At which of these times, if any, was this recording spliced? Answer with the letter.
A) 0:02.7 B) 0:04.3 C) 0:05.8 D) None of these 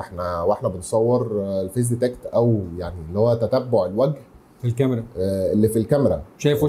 D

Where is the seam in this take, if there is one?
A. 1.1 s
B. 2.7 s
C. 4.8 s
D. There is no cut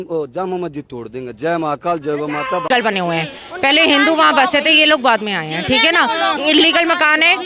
B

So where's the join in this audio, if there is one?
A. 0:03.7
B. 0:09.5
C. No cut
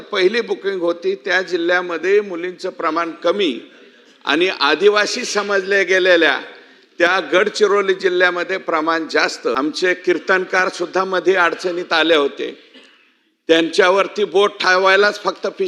B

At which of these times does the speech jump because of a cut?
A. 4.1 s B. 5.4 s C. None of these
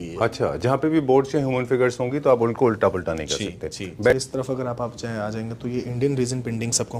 A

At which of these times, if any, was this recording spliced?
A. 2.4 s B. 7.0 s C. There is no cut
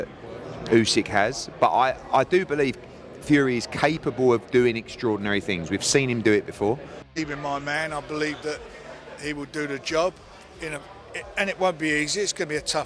B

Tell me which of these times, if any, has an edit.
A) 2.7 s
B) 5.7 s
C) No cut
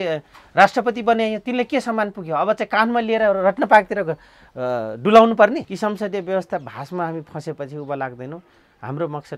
B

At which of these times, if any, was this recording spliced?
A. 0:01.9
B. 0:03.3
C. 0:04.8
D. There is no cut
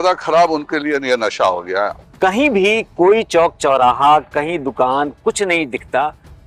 A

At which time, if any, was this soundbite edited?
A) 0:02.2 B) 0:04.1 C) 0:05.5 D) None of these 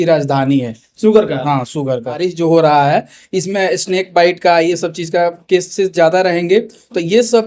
A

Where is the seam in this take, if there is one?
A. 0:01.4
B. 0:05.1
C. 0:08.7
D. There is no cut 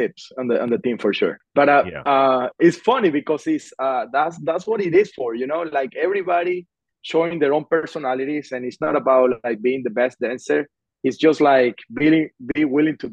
A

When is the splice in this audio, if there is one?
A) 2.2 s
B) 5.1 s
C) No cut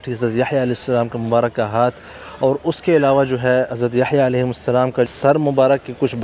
B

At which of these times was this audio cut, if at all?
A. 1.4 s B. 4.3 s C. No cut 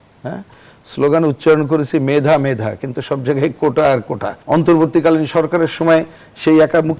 B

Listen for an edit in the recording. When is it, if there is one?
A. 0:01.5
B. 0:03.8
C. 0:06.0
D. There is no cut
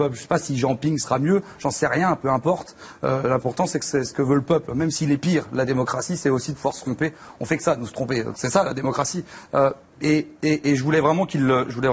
A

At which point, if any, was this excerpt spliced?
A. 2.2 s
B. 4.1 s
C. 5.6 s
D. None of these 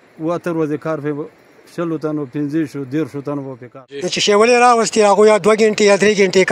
B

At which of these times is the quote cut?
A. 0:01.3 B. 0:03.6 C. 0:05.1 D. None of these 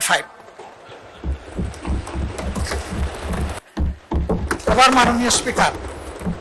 B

